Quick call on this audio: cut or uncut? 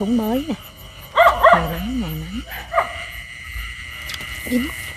cut